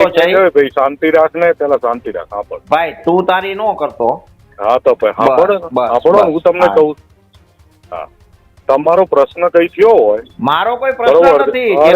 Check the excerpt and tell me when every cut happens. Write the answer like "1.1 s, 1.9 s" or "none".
none